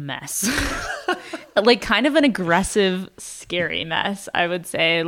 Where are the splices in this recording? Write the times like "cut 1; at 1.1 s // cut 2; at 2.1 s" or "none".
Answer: none